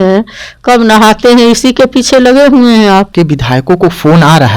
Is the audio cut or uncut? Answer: cut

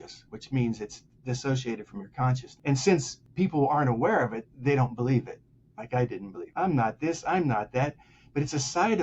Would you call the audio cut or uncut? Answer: cut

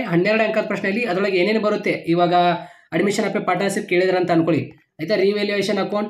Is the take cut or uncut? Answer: uncut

